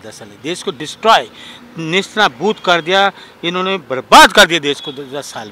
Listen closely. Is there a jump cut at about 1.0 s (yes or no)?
no